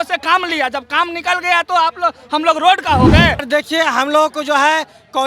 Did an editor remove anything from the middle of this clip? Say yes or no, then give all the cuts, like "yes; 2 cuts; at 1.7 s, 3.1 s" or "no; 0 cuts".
yes; 1 cut; at 3.4 s